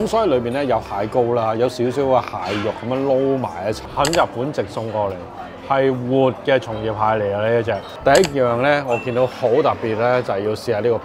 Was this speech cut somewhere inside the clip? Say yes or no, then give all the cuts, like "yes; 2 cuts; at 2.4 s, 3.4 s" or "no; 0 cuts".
yes; 2 cuts; at 3.9 s, 7.8 s